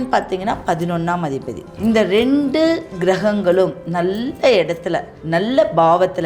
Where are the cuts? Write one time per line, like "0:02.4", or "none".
0:01.6
0:05.1